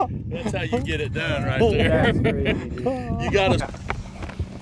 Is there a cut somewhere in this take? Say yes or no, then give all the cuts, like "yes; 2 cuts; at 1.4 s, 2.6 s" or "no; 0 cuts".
yes; 1 cut; at 3.7 s